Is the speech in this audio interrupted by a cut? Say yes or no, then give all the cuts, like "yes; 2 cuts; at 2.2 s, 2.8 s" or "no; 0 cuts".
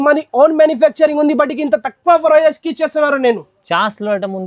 no; 0 cuts